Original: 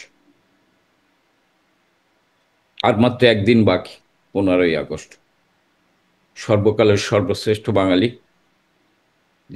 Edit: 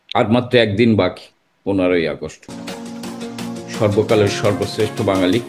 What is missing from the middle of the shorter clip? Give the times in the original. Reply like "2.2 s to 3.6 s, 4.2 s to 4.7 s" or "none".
none